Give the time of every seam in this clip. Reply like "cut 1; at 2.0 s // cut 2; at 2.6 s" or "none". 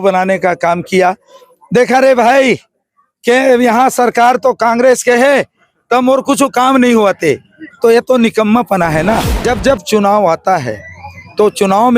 cut 1; at 9.4 s